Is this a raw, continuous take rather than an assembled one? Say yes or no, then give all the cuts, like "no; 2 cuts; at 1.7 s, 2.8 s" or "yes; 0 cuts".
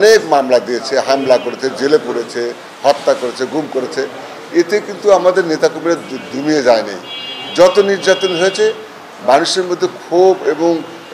yes; 0 cuts